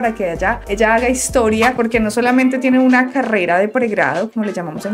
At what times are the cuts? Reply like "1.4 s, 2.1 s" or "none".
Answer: 1.7 s